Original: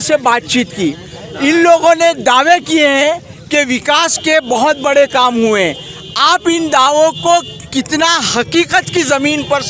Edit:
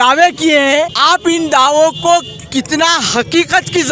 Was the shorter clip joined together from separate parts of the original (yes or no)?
yes